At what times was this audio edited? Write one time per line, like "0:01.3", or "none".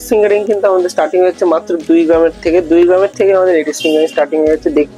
none